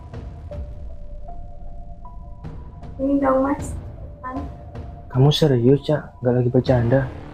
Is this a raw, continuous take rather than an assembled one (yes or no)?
no